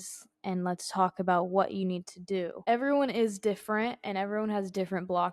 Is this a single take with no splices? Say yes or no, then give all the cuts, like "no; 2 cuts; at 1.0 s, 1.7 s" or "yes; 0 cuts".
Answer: no; 1 cut; at 2.5 s